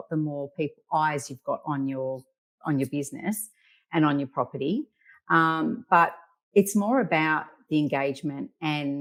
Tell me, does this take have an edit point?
no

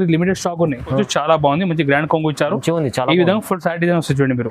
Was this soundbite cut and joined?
yes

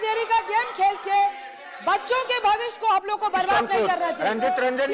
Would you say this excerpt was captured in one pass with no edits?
yes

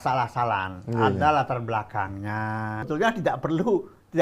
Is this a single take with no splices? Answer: no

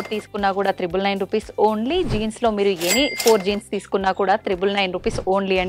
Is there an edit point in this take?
no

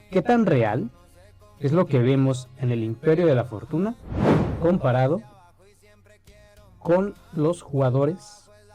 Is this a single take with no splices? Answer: yes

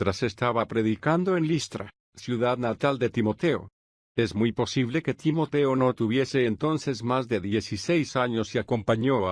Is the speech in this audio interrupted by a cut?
yes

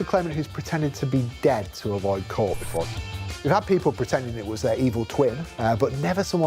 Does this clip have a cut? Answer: yes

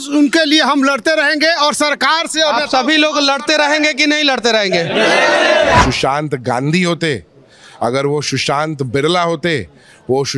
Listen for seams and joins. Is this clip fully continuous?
no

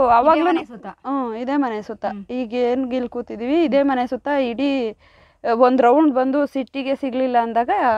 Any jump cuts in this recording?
no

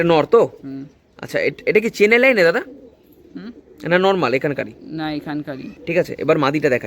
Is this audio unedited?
no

